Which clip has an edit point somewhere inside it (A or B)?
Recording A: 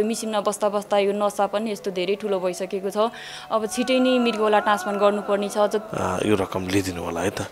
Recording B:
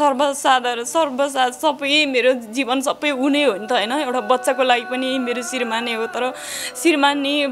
A